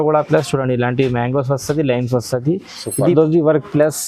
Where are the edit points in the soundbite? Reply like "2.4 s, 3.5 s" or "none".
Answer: 3.1 s